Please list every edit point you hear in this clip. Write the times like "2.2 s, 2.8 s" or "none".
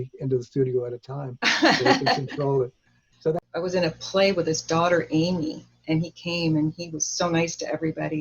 3.4 s